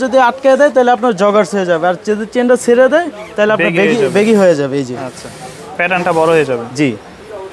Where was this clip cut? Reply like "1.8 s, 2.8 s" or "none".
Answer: none